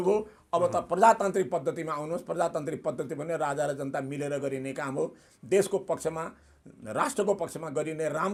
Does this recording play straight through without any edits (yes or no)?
yes